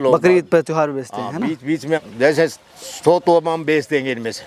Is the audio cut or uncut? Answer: cut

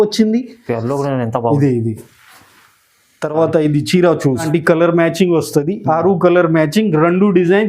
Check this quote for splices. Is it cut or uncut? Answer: cut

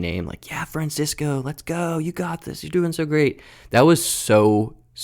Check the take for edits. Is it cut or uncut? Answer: uncut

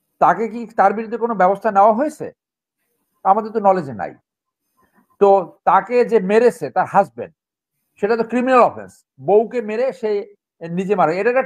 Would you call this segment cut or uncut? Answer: uncut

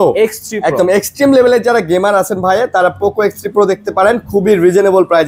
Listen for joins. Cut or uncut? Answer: uncut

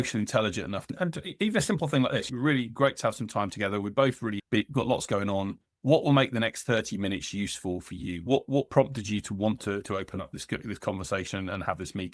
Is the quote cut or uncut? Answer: cut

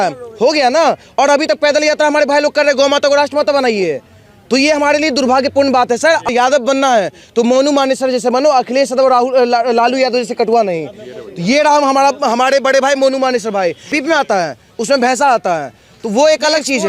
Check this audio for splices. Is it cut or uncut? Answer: cut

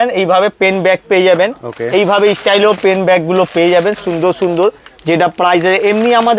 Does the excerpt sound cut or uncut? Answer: uncut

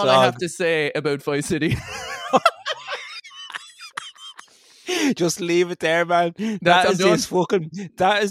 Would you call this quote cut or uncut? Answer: cut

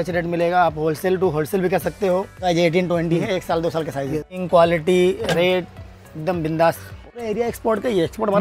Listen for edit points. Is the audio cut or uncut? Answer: cut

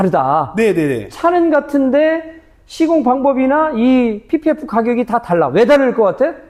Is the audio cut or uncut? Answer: uncut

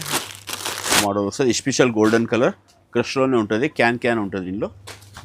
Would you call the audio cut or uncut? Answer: cut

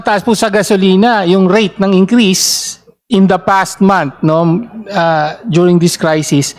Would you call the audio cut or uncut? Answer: uncut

